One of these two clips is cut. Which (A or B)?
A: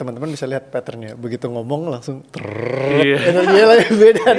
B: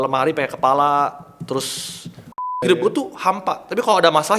B